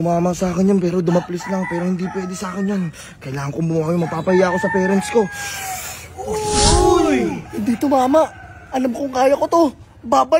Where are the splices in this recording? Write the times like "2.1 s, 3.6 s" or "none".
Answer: none